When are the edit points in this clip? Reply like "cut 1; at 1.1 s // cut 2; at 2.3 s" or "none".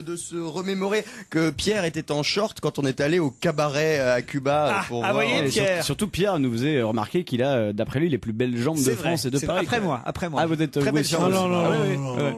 cut 1; at 7.3 s